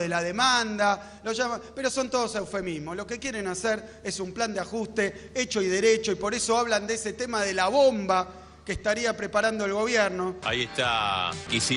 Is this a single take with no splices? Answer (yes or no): no